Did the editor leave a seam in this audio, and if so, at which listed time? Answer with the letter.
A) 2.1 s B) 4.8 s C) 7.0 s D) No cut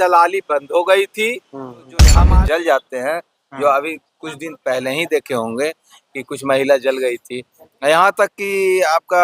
A